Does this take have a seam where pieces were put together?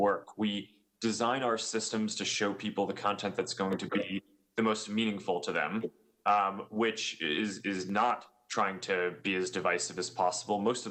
no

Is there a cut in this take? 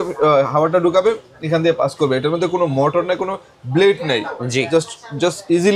no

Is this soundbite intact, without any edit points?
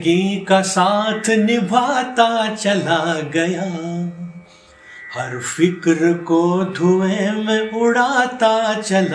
yes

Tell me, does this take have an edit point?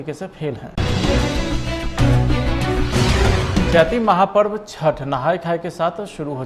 no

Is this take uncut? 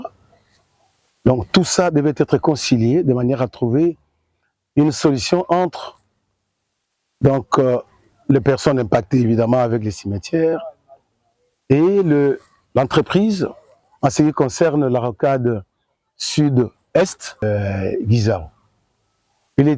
no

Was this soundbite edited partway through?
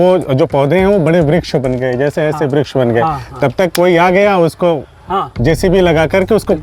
no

